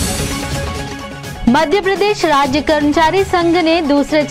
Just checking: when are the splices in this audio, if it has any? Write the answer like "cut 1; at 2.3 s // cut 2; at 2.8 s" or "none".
cut 1; at 1.3 s